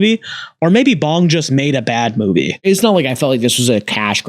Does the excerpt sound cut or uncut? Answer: cut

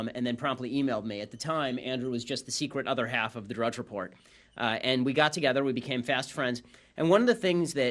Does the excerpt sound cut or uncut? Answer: uncut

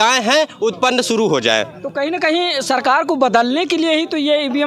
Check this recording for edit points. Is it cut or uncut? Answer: uncut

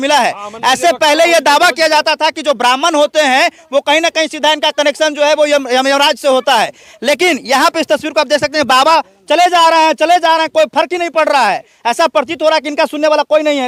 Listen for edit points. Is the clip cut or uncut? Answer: uncut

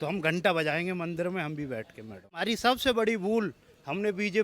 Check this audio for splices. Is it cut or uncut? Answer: cut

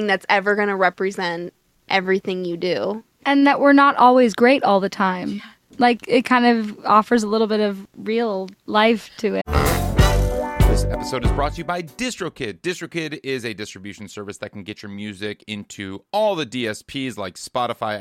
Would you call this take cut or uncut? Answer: cut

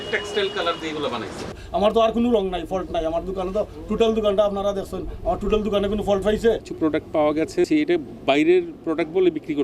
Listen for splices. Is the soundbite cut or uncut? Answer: cut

